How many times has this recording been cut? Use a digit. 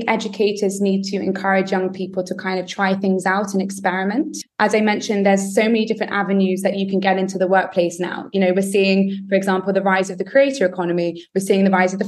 1